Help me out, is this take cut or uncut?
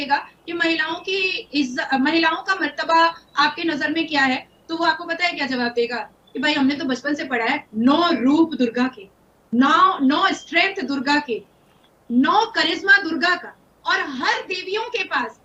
uncut